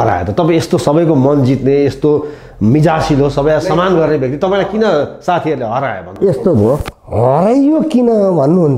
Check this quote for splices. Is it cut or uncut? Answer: uncut